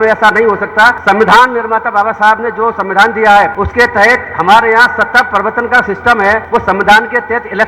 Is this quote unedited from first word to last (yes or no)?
no